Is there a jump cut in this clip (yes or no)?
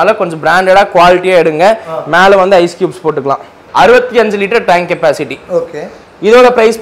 yes